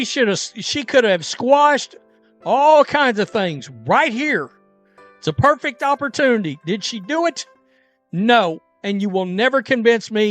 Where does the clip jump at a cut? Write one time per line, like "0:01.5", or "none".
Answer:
0:09.3